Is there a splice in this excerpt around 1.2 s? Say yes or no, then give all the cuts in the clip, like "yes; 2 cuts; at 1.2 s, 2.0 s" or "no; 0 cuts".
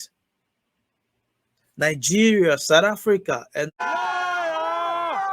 no; 1 cut; at 3.8 s